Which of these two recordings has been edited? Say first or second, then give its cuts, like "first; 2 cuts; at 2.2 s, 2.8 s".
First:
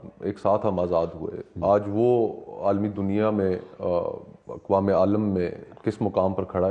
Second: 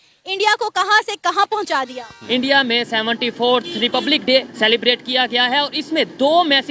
second; 1 cut; at 2.2 s